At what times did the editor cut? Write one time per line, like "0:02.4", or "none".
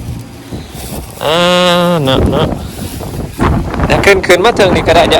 none